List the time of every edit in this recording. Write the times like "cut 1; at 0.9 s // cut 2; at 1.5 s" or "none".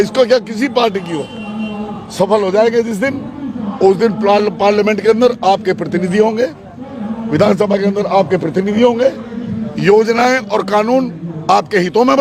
none